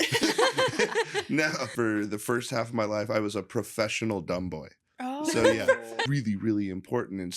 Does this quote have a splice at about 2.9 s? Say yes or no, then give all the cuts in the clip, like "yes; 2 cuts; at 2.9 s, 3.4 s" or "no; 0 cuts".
no; 2 cuts; at 1.7 s, 6.0 s